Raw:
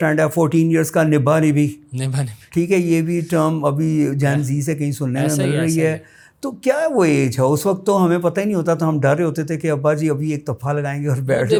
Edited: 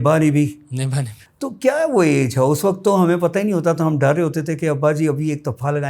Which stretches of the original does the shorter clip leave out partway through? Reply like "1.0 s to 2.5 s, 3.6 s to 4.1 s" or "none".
2.3 s to 6.1 s